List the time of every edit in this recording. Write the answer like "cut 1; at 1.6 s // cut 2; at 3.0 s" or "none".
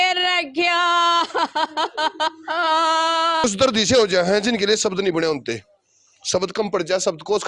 cut 1; at 3.4 s